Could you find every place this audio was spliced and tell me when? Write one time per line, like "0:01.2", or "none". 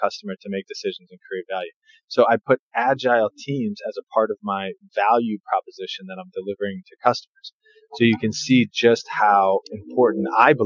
none